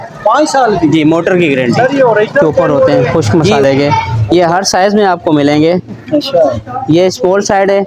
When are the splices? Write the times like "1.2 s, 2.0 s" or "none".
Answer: 3.1 s